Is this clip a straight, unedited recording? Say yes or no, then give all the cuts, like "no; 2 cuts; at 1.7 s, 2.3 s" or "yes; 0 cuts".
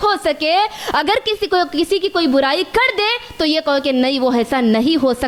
yes; 0 cuts